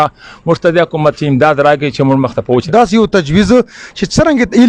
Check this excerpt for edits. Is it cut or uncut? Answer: cut